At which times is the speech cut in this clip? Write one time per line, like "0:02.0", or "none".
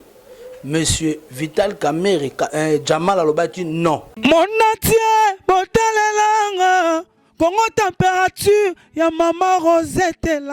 0:04.1